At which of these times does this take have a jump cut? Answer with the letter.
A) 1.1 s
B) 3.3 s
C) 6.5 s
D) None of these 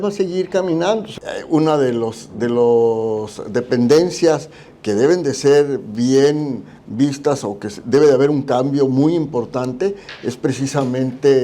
A